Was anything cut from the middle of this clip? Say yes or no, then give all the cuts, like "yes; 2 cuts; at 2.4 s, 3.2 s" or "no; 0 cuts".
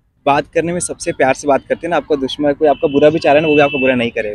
no; 0 cuts